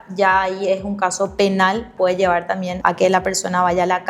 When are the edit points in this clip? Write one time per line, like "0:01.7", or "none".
0:01.9
0:02.8

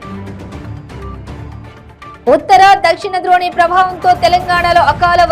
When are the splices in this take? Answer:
0:01.1

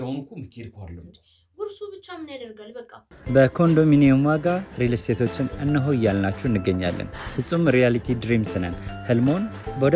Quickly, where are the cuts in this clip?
0:03.1

